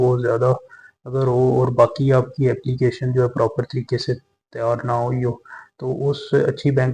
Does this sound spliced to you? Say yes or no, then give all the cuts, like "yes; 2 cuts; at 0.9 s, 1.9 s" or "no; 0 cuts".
no; 0 cuts